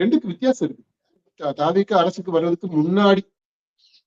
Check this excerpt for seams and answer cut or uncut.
cut